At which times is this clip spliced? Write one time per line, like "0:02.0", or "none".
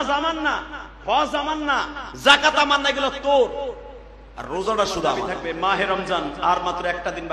0:05.3